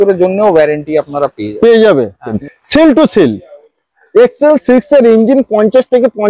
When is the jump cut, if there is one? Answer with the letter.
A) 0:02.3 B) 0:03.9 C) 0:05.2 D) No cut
A